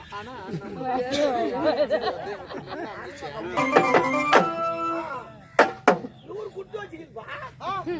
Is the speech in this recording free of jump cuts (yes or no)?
no